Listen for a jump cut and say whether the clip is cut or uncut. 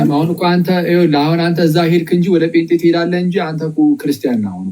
uncut